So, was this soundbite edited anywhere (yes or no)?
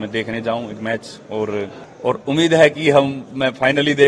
yes